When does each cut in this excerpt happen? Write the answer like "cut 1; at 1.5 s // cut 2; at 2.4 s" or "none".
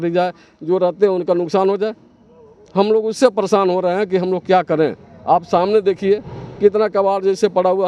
none